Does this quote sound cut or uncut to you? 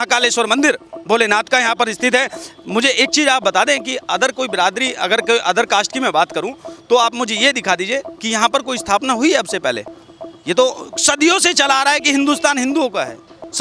uncut